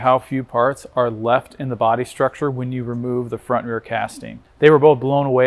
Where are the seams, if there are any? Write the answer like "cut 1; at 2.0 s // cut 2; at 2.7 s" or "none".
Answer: cut 1; at 4.4 s